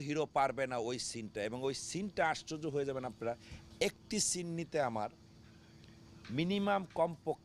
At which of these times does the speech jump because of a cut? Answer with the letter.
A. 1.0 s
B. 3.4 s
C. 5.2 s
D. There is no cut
D